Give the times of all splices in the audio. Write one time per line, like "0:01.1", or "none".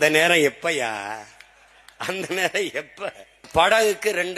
0:03.5